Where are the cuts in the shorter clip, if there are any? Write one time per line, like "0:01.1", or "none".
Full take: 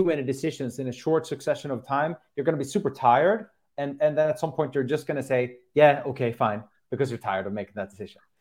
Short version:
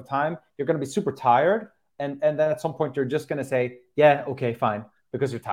none

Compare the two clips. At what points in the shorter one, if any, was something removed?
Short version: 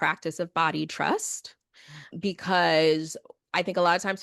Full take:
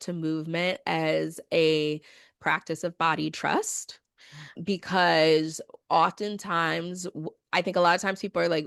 0:03.2

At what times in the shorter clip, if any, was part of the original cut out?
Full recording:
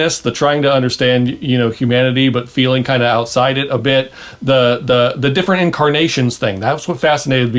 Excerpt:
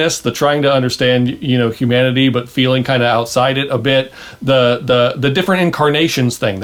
none

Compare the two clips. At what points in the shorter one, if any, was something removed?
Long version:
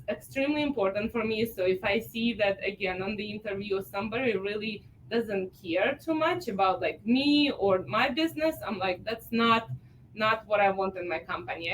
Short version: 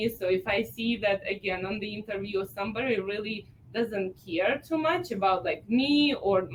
none

